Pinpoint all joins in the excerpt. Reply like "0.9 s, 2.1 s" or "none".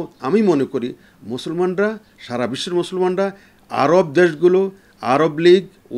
none